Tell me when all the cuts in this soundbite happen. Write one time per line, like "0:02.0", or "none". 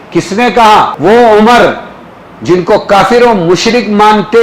0:00.9